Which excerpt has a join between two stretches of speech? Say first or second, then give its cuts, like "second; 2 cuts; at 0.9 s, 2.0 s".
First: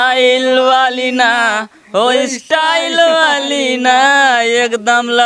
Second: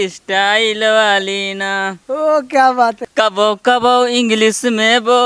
second; 1 cut; at 3.0 s